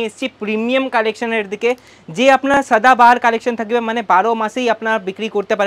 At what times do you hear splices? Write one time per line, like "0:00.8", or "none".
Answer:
none